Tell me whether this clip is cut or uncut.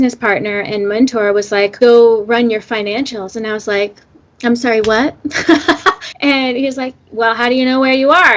cut